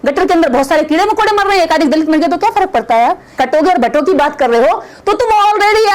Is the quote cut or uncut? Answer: cut